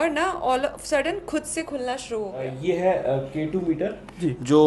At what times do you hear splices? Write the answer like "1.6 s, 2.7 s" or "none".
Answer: 2.5 s